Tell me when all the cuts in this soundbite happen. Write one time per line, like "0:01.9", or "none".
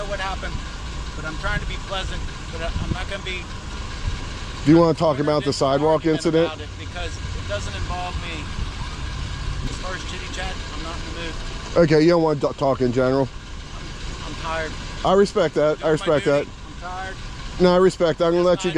0:09.7